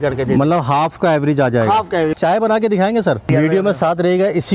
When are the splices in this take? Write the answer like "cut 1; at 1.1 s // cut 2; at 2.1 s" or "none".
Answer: cut 1; at 2.1 s // cut 2; at 3.3 s